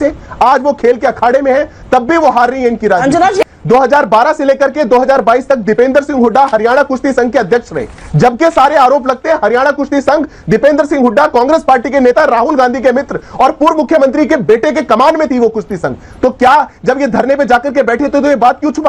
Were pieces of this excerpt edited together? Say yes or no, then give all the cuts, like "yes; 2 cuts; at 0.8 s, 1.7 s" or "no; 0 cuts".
no; 0 cuts